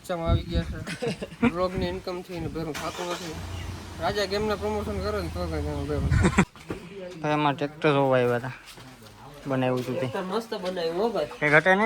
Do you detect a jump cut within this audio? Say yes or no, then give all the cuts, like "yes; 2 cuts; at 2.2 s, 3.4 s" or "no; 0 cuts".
yes; 1 cut; at 6.5 s